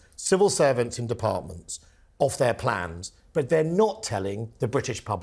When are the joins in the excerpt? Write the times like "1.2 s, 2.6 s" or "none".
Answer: none